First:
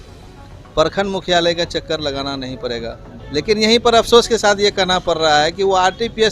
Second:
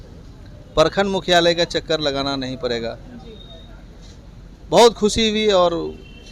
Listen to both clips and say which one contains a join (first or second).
first